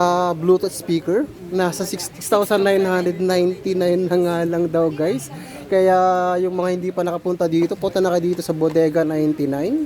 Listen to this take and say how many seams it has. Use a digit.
1